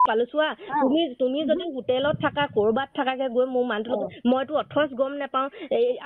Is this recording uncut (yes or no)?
yes